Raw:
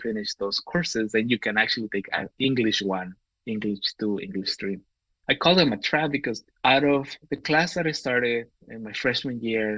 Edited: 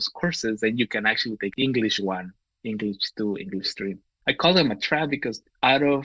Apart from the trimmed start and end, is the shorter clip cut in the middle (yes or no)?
yes